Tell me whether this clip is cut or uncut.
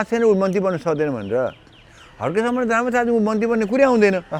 uncut